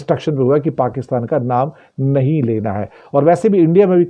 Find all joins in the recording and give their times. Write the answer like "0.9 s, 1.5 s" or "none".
none